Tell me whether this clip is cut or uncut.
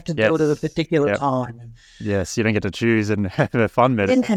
uncut